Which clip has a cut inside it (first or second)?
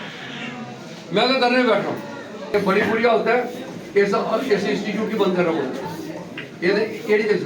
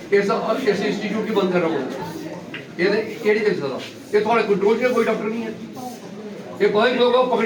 first